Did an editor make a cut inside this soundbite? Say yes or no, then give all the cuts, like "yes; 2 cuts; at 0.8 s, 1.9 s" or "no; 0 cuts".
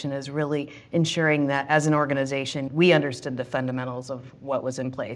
no; 0 cuts